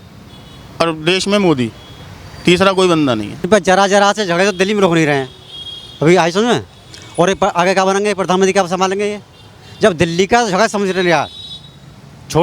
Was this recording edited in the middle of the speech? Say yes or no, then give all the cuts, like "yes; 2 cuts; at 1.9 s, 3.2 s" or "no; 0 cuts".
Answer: yes; 1 cut; at 3.5 s